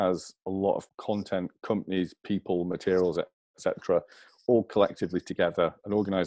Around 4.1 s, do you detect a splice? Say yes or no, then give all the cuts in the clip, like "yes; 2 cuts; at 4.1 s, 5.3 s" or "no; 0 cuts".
no; 1 cut; at 0.9 s